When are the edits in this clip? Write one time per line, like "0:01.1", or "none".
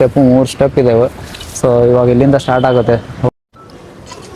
0:03.3